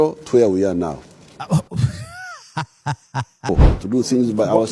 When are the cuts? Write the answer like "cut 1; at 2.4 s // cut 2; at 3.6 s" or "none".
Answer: cut 1; at 3.4 s